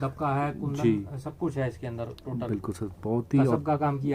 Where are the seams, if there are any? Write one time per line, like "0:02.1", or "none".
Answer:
none